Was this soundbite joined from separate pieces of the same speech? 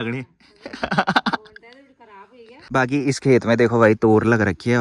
yes; 1 cut; at 2.7 s

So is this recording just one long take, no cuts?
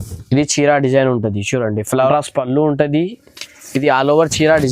no; 1 cut; at 2.1 s

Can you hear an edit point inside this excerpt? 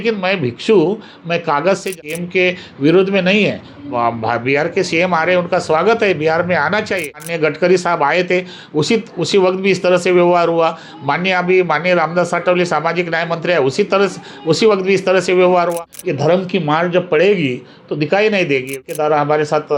yes; 4 cuts; at 1.9 s, 7.2 s, 15.7 s, 18.7 s

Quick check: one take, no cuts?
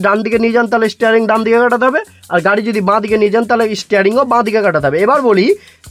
yes; 0 cuts

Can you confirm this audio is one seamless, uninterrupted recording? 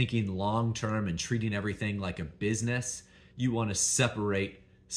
yes; 0 cuts

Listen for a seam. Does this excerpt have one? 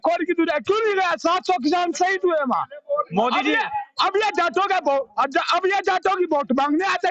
no; 0 cuts

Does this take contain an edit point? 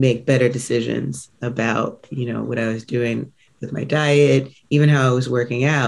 no; 0 cuts

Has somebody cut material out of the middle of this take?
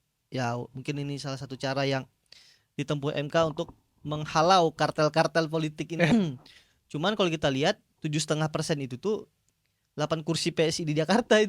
yes; 1 cut; at 6.1 s

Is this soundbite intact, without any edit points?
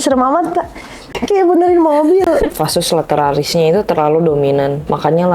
no; 1 cut; at 1.2 s

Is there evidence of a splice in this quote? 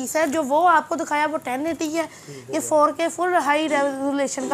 no; 0 cuts

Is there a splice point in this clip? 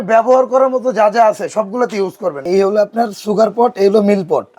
yes; 1 cut; at 2.4 s

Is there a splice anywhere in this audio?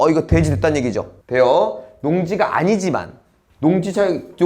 yes; 1 cut; at 1.1 s

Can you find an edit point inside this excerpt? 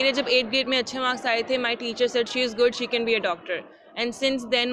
no; 0 cuts

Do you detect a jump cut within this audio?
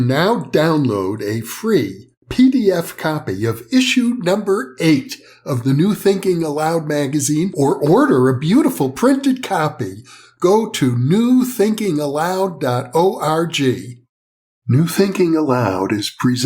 yes; 1 cut; at 14.6 s

